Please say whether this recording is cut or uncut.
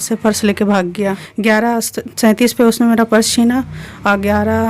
cut